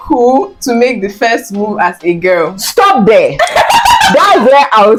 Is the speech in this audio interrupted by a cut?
no; 0 cuts

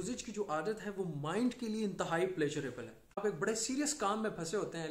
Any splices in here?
yes; 1 cut; at 3.2 s

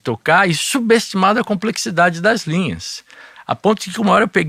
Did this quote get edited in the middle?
no; 0 cuts

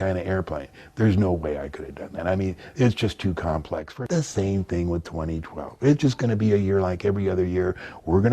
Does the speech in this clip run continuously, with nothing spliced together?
no; 1 cut; at 3.9 s

